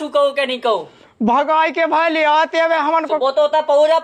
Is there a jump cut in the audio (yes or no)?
no